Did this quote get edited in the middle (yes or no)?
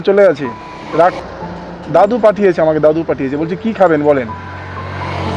yes